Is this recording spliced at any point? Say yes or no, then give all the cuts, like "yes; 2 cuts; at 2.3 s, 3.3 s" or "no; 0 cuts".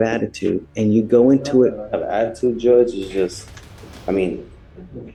no; 0 cuts